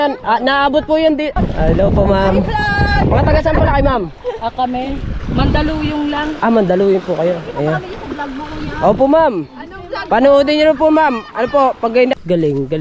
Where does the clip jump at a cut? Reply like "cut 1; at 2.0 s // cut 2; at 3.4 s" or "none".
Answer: cut 1; at 1.3 s // cut 2; at 12.1 s